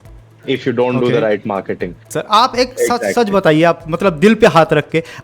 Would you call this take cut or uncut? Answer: cut